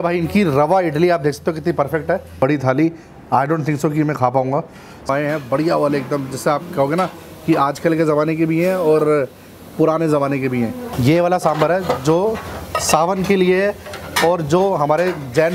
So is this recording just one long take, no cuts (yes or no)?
no